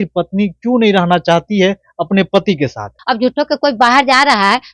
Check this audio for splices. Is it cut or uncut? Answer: cut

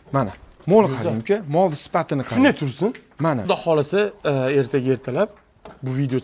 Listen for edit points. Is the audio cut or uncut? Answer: cut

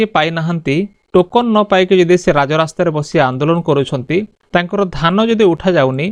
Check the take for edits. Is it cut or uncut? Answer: uncut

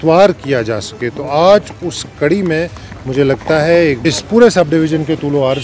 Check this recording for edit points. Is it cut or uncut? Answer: cut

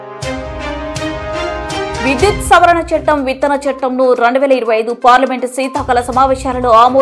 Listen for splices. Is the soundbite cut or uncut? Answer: cut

